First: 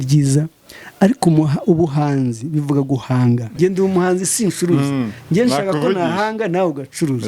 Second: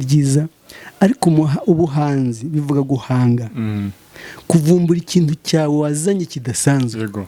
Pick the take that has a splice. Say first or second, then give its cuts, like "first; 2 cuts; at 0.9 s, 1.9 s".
first; 1 cut; at 3.5 s